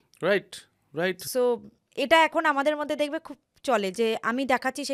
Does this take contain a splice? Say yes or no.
no